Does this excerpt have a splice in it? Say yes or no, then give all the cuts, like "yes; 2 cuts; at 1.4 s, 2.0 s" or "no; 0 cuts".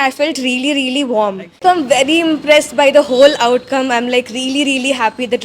yes; 1 cut; at 1.6 s